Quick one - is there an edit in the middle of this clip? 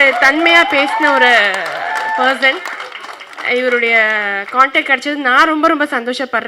no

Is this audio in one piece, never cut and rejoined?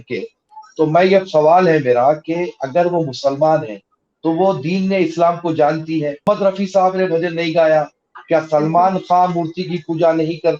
no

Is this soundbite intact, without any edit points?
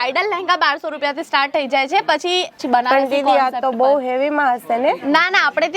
no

